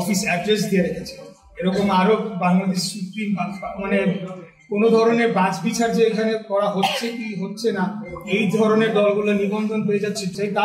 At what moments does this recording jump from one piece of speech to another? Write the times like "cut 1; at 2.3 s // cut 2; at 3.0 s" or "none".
none